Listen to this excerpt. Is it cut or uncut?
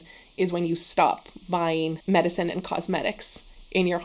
uncut